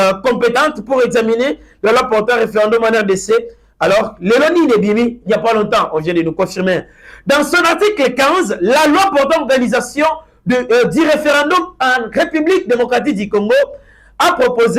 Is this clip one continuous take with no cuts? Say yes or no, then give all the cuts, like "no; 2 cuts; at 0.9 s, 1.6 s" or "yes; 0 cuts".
yes; 0 cuts